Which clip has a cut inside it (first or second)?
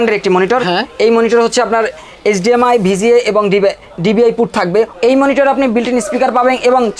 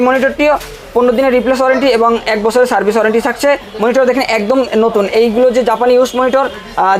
first